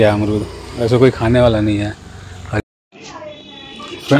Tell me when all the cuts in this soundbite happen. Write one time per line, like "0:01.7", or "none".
0:02.6